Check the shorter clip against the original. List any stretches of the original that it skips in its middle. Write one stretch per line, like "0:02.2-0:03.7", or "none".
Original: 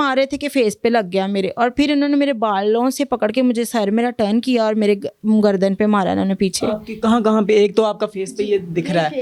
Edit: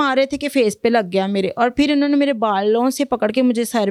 none